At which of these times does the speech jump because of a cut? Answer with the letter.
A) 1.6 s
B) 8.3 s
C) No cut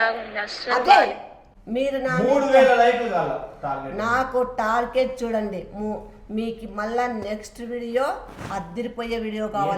A